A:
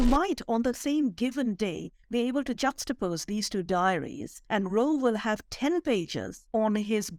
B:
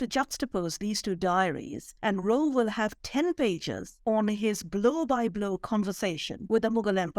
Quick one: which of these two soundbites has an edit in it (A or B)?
B